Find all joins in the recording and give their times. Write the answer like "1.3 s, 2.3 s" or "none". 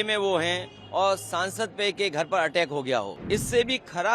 3.2 s